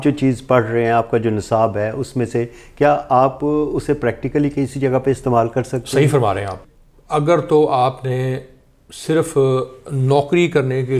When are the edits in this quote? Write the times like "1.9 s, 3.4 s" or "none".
6.6 s